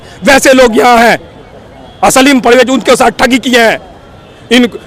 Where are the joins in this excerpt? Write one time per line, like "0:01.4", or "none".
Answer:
none